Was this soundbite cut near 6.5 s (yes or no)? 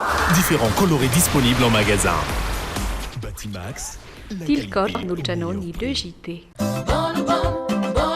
yes